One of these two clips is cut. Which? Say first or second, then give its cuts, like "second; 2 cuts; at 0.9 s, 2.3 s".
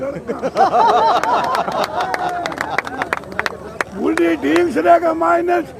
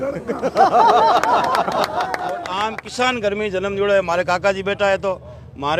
second; 1 cut; at 2.5 s